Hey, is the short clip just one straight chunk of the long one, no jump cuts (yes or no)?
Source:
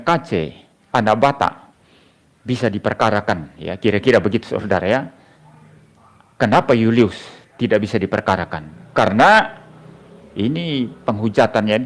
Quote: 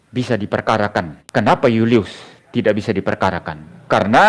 no